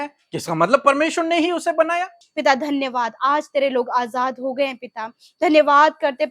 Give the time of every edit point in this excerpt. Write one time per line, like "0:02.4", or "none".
0:02.2